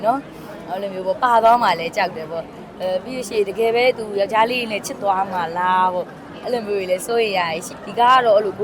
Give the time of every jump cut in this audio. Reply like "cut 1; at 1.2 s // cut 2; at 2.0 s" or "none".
cut 1; at 7.7 s